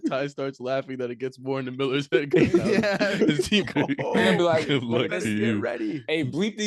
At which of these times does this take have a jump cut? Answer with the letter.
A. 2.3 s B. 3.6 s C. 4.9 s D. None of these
B